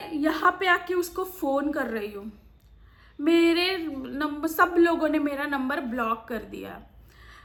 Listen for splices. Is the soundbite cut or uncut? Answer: uncut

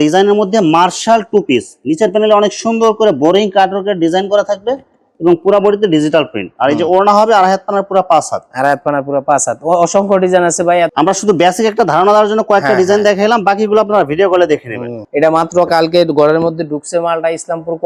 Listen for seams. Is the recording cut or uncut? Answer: uncut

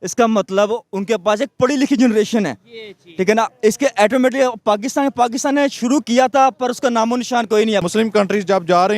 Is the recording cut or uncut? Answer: cut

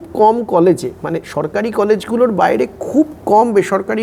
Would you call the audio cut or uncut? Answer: uncut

